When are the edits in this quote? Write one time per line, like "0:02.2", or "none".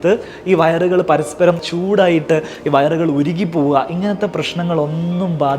0:01.6